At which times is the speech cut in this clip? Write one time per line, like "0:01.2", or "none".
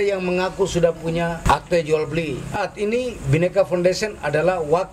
0:01.4
0:02.6